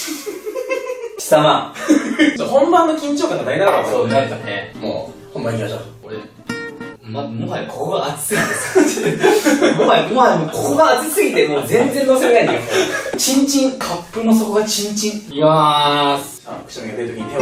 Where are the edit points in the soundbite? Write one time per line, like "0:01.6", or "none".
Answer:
0:09.0